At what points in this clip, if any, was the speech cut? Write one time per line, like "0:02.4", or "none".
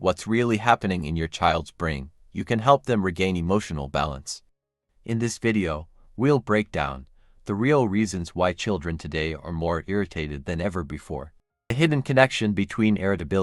0:11.7

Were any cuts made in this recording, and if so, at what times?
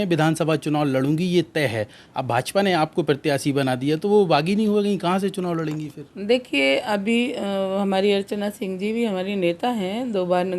none

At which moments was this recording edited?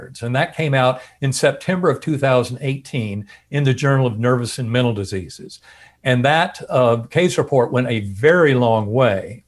none

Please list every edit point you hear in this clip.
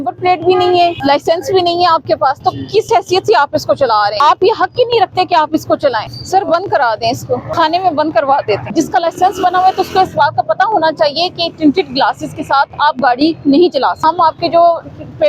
0:01.0
0:04.2
0:06.1
0:07.5
0:08.7
0:14.0

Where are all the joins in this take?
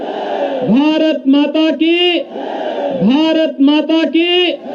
none

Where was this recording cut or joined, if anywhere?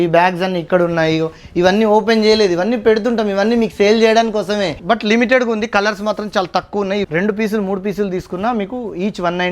0:04.8
0:07.0

